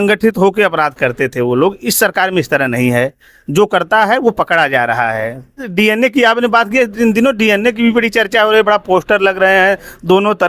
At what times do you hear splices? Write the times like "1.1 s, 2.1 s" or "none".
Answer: 5.7 s

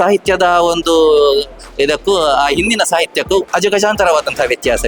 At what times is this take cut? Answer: none

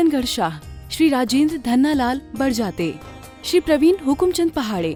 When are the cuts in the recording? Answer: none

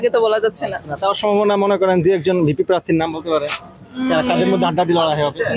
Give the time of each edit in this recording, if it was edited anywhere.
none

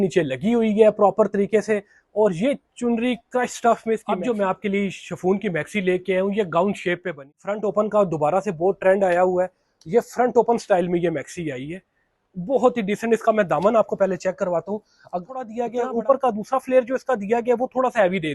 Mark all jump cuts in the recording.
4.1 s, 7.3 s, 15.6 s

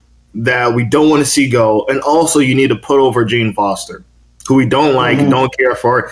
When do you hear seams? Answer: none

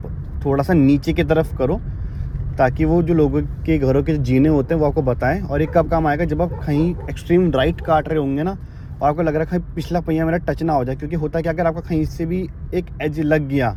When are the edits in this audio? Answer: none

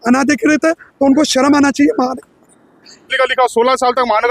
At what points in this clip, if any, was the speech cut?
3.1 s

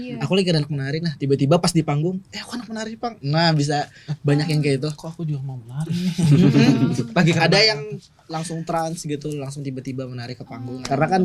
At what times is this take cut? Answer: none

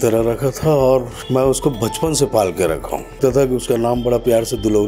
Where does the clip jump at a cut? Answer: 1.2 s, 3.2 s

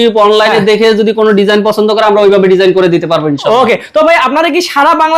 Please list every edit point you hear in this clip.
none

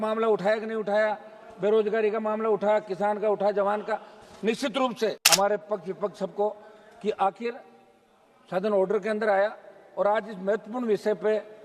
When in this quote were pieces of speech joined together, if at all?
5.2 s

